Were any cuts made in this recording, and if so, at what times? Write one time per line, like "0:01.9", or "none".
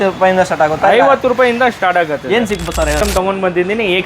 0:03.0